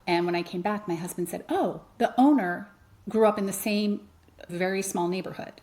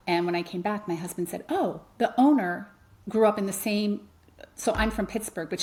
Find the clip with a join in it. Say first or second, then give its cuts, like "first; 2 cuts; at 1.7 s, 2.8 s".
first; 1 cut; at 4.5 s